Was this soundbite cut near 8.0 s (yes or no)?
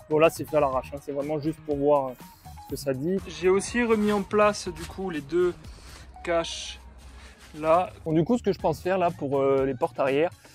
yes